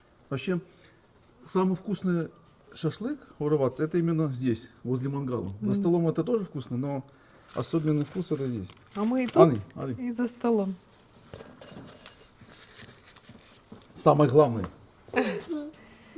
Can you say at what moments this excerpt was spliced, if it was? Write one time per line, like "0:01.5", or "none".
none